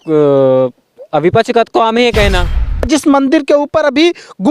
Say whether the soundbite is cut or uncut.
cut